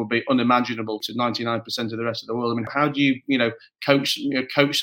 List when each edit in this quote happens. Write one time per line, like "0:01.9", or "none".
0:01.1
0:02.7